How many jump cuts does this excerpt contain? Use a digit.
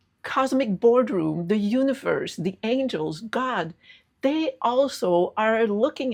0